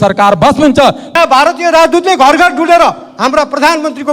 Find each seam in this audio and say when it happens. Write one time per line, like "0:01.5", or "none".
0:01.0